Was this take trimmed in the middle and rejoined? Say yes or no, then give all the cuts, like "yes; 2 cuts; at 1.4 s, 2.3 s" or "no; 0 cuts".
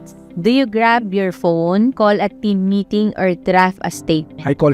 yes; 1 cut; at 1.9 s